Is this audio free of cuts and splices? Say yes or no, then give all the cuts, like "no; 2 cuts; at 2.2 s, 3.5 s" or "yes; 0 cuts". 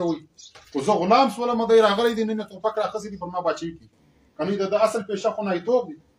yes; 0 cuts